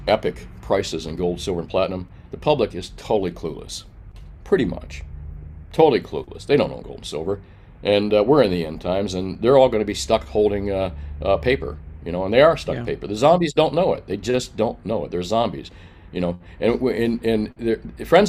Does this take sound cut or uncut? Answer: uncut